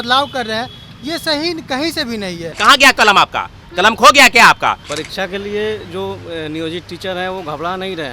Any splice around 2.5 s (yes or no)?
yes